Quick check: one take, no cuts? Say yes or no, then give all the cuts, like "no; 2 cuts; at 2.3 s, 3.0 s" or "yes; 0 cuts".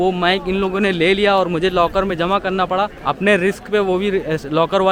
yes; 0 cuts